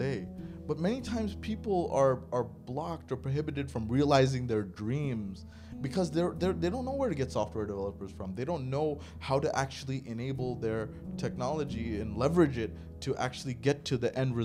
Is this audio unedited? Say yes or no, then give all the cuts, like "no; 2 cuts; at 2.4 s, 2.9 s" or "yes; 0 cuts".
yes; 0 cuts